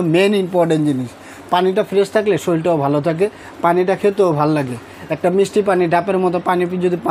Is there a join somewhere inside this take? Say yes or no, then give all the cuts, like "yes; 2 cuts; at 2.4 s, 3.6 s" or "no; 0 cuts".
no; 0 cuts